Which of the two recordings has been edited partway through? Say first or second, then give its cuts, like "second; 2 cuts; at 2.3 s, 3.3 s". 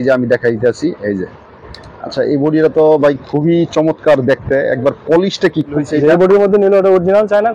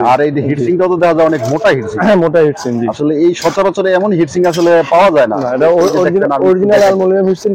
first; 1 cut; at 5.8 s